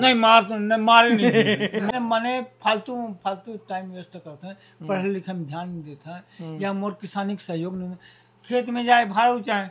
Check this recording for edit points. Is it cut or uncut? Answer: cut